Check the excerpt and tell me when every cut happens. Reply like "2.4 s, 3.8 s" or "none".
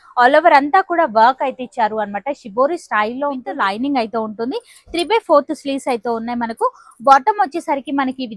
3.5 s